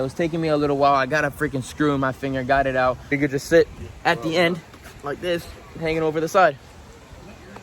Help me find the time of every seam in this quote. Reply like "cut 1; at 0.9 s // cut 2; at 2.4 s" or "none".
cut 1; at 3.1 s